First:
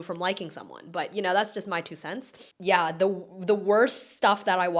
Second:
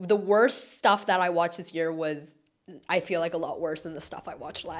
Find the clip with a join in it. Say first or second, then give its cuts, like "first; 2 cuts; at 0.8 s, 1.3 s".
first; 1 cut; at 2.4 s